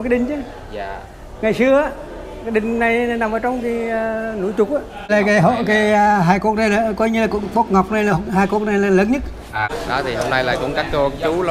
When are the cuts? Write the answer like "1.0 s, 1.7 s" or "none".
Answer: 5.1 s, 9.7 s